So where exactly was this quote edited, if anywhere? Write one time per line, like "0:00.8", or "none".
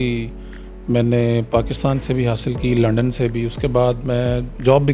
none